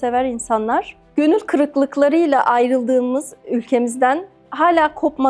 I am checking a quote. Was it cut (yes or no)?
yes